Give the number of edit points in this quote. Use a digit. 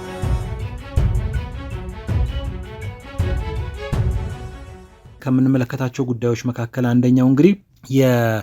1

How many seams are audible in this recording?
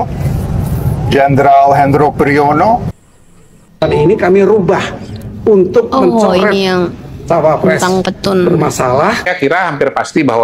2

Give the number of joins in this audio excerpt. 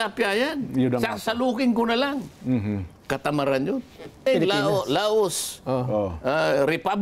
1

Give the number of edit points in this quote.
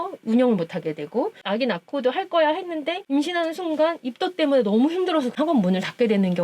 1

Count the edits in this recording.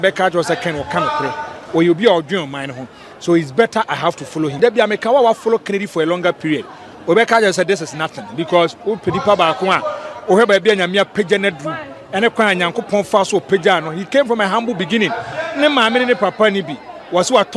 1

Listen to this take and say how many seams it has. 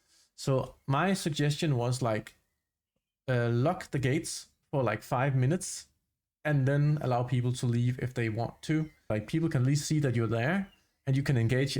1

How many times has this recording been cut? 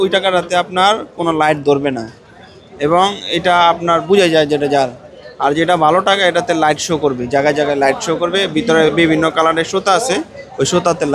0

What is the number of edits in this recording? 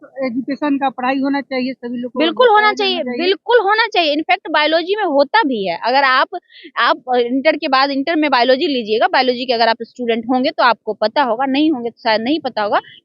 0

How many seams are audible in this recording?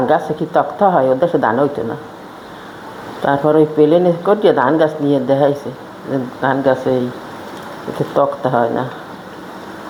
0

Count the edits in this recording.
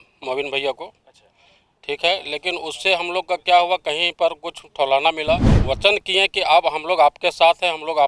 1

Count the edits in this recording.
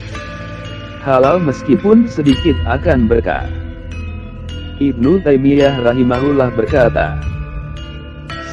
3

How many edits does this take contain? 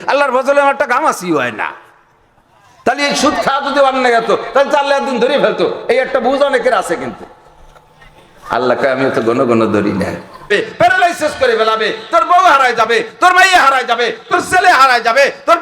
1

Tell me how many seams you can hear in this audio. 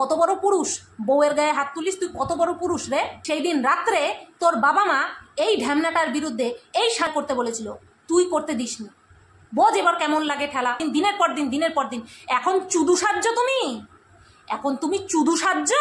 3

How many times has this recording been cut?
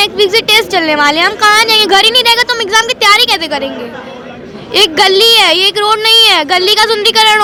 0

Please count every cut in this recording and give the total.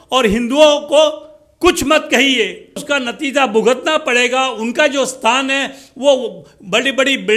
1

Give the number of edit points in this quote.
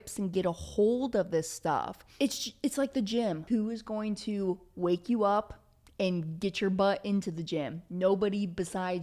2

